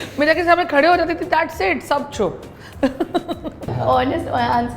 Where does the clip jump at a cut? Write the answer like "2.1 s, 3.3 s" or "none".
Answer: 3.7 s